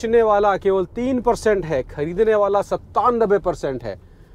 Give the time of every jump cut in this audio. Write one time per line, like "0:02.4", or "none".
none